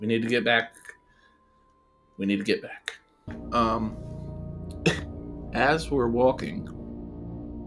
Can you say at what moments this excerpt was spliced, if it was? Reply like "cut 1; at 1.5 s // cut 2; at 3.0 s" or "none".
cut 1; at 3.3 s